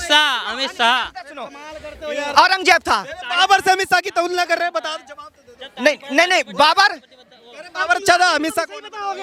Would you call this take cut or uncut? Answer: uncut